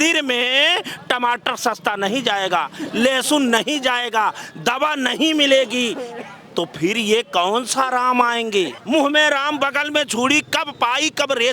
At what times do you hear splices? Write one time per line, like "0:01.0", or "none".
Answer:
0:08.8